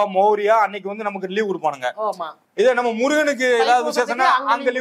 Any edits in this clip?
yes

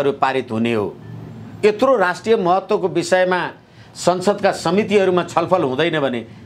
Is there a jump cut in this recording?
no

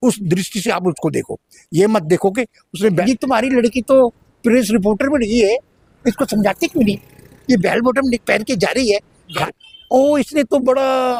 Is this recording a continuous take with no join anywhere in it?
yes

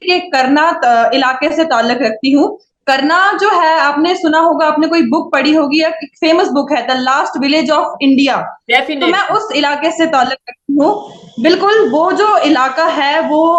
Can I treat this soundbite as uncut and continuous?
yes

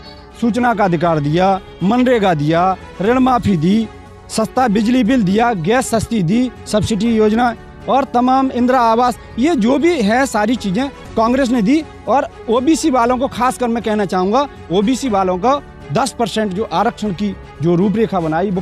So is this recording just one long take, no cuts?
yes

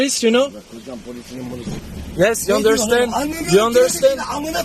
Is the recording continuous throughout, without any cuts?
no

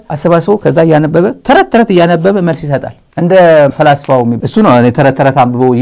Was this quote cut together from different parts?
yes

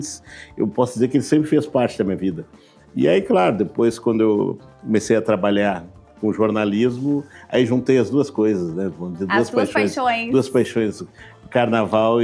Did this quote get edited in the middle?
no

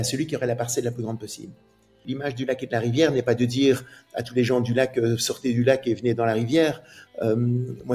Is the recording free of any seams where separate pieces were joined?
no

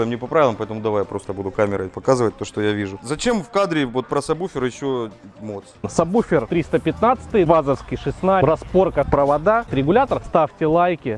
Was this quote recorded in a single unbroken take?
no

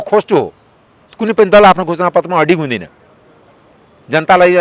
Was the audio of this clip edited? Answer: no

